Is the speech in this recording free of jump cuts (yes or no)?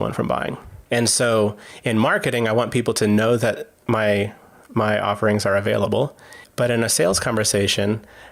yes